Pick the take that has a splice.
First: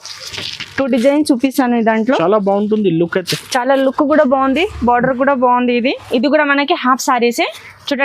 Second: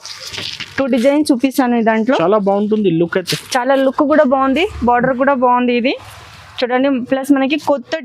first; 1 cut; at 6.1 s

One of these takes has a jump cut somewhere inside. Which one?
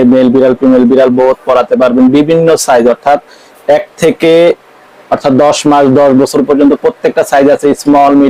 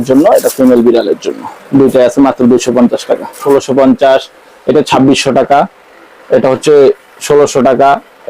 second; 1 cut; at 3.3 s

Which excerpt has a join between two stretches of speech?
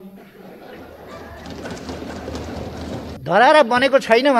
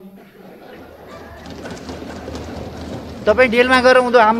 first; 1 cut; at 3.2 s

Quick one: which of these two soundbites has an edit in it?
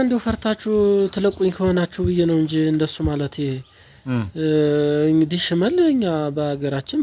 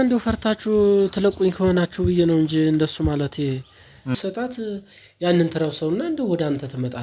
second; 1 cut; at 4.1 s

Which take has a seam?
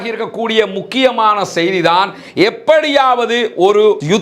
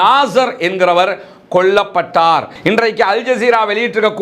second; 1 cut; at 2.5 s

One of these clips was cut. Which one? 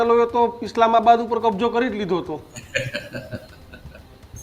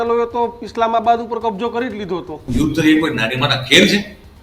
second; 1 cut; at 2.5 s

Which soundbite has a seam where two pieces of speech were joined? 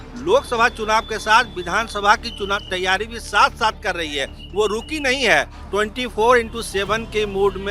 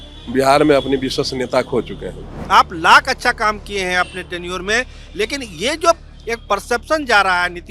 second; 1 cut; at 2.3 s

